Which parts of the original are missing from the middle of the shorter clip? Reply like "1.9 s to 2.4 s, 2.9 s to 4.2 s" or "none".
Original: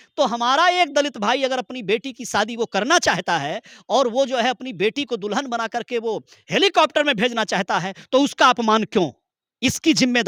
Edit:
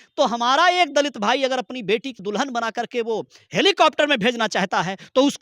2.2 s to 5.2 s